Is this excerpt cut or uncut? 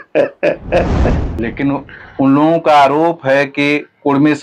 cut